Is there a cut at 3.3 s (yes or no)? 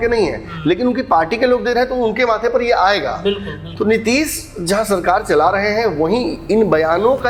no